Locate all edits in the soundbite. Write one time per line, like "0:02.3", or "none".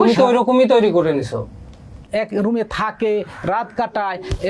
0:02.0